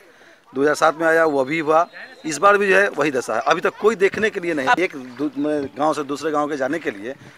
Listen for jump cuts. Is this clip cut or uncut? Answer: cut